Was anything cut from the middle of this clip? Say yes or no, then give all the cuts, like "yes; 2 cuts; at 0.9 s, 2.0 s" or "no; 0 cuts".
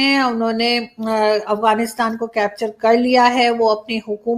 no; 0 cuts